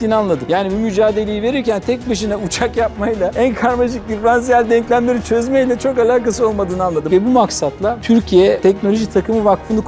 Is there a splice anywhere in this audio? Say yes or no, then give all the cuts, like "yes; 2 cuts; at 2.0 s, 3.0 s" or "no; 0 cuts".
no; 0 cuts